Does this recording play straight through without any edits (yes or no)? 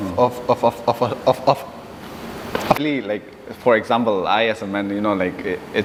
yes